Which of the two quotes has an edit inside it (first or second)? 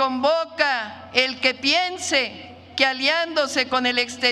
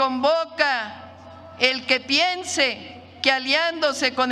first